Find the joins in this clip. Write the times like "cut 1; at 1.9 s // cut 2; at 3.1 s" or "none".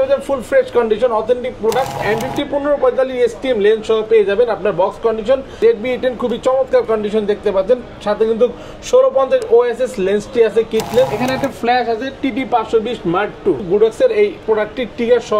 cut 1; at 2.0 s // cut 2; at 5.6 s // cut 3; at 11.1 s // cut 4; at 13.6 s